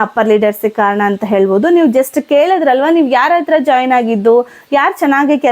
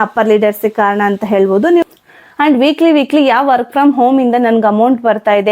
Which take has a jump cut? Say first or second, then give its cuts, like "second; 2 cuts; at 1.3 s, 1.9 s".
second; 1 cut; at 2.1 s